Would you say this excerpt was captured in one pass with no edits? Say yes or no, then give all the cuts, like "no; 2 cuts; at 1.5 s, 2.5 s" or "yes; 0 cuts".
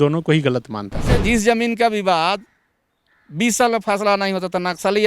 no; 1 cut; at 1.2 s